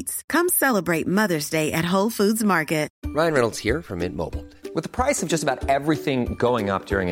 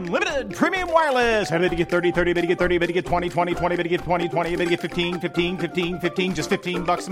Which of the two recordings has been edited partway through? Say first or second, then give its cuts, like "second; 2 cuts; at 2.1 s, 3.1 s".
first; 1 cut; at 3.0 s